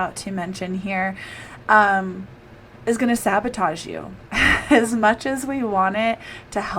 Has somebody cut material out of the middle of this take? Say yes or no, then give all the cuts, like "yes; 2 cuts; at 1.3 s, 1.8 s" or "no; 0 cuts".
no; 0 cuts